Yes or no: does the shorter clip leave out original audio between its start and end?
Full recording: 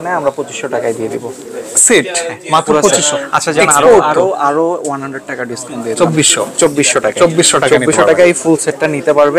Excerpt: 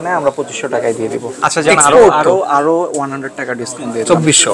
yes